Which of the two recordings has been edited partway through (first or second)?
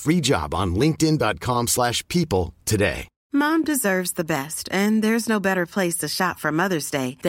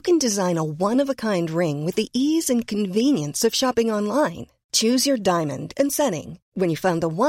first